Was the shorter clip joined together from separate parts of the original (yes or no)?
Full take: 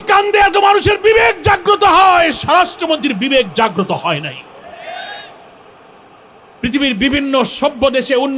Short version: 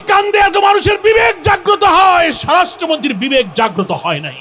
no